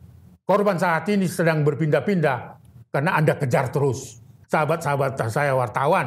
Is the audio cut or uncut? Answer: cut